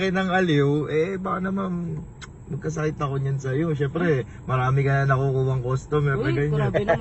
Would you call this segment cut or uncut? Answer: uncut